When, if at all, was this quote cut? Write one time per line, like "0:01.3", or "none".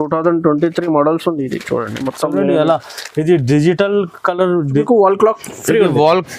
0:04.8